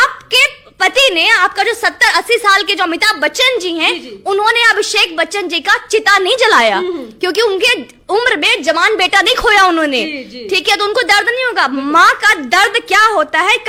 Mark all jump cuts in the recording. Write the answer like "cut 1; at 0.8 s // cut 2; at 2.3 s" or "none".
none